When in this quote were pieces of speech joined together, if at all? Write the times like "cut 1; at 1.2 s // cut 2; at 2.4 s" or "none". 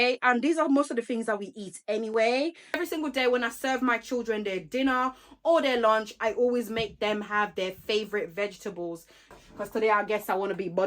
cut 1; at 2.7 s // cut 2; at 9.3 s